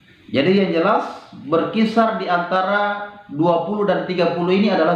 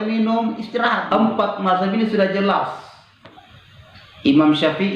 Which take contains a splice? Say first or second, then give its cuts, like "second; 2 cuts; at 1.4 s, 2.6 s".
second; 1 cut; at 1.0 s